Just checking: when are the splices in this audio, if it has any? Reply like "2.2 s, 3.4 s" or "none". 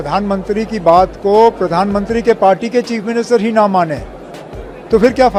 none